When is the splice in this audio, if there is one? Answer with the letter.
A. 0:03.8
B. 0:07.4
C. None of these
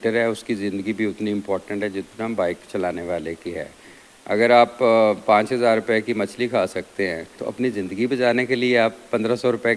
B